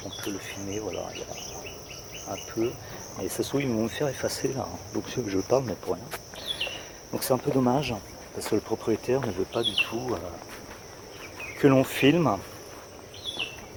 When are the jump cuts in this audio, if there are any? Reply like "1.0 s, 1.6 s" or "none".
none